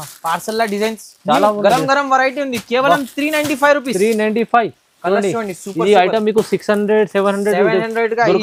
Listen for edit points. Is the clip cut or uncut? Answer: uncut